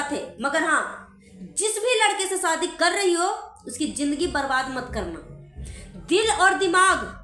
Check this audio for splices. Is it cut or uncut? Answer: uncut